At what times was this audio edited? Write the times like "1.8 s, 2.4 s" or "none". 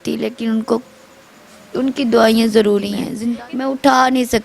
3.0 s